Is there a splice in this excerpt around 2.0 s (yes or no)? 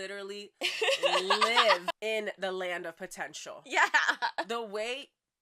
yes